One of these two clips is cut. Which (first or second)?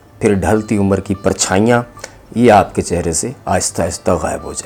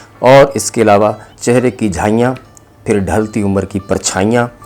second